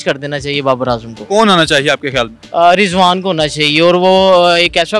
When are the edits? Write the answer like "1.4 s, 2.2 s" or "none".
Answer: none